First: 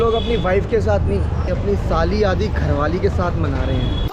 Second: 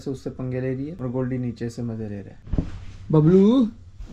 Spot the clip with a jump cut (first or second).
second